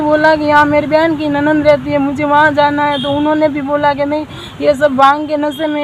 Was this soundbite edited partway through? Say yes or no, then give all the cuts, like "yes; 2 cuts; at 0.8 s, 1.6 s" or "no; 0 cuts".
no; 0 cuts